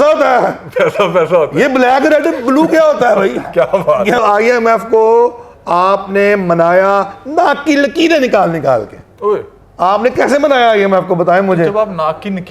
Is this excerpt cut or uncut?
cut